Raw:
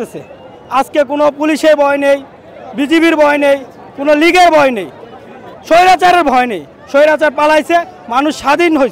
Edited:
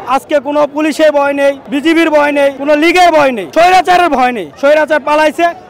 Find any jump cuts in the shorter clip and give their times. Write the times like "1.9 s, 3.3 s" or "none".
1.7 s, 2.6 s, 3.4 s, 4.5 s

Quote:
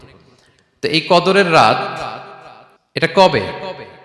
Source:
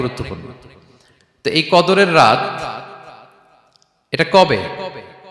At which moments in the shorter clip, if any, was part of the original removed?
3.1 s

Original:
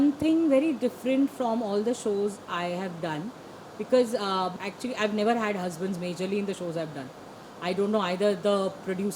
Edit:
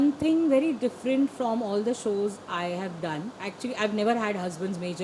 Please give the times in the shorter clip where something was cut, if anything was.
3.5 s

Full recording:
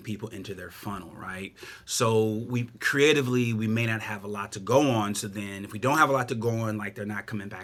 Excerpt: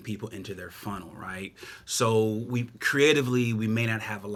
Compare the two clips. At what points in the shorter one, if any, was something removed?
none

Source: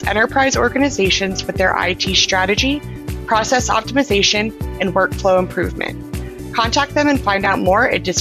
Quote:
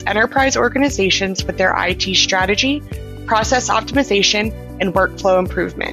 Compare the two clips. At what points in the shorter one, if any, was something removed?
none

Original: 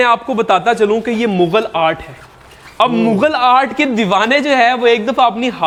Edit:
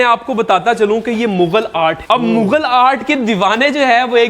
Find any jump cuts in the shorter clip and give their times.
2.0 s

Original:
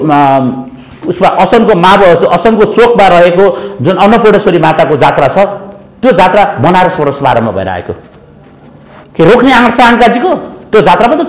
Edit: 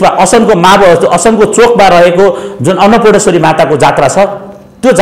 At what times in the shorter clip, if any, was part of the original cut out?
none

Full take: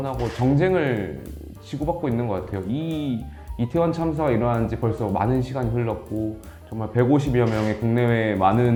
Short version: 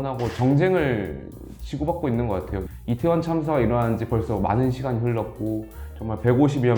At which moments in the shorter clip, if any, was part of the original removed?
2.6 s

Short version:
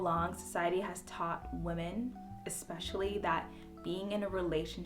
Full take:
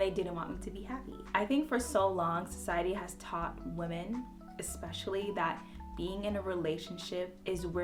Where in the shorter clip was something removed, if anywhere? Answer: none

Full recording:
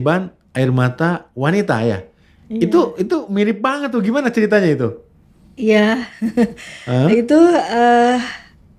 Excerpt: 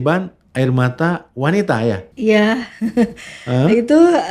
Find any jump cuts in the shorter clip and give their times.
2.1 s

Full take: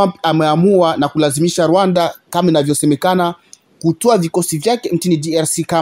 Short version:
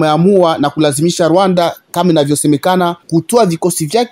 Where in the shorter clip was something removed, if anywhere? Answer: 3.0 s

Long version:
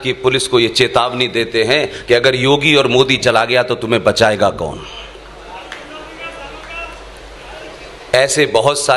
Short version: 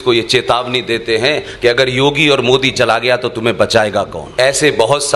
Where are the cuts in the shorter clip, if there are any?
4.2 s

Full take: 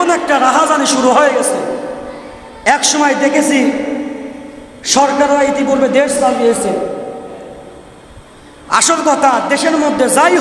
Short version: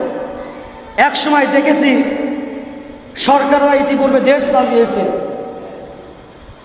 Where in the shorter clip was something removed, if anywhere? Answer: none

